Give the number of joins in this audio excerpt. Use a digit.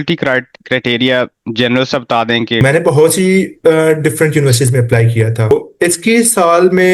2